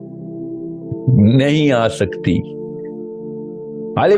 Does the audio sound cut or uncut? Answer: cut